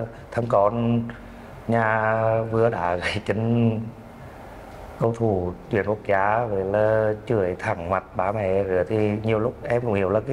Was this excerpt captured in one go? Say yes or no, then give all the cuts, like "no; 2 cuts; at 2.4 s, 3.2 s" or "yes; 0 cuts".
yes; 0 cuts